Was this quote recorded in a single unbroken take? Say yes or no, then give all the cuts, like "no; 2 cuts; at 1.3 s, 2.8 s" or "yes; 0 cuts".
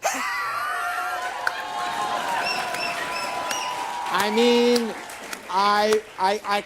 yes; 0 cuts